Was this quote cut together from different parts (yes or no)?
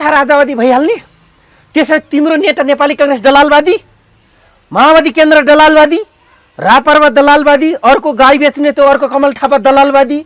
no